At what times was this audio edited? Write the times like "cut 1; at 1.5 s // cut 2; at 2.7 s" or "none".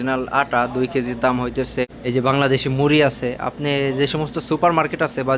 cut 1; at 1.9 s